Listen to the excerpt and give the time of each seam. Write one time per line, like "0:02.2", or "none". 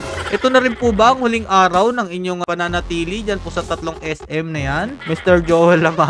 0:02.4
0:05.0